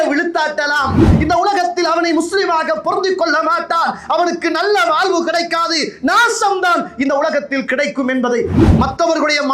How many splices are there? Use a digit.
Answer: 2